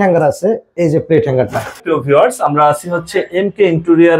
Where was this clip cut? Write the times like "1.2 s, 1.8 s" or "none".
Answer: none